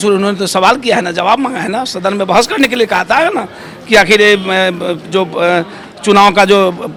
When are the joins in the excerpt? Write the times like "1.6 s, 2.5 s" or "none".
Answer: none